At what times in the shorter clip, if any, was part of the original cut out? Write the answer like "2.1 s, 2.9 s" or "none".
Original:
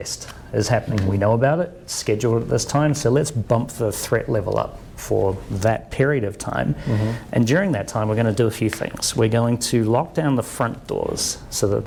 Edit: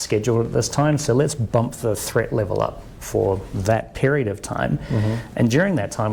none